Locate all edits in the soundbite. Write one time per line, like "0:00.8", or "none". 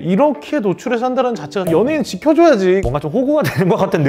0:01.6
0:02.8